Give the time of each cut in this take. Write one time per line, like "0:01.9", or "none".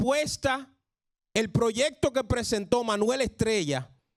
none